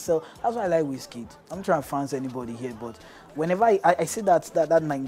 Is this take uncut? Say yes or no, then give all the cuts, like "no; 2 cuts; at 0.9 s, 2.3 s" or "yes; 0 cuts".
yes; 0 cuts